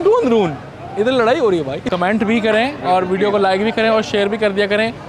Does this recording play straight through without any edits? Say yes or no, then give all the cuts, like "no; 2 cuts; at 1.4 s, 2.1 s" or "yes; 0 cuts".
no; 1 cut; at 1.9 s